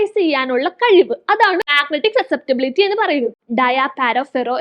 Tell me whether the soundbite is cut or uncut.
cut